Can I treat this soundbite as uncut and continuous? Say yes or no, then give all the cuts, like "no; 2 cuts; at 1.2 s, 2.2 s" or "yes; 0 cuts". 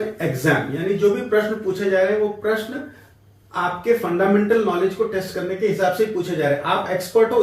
yes; 0 cuts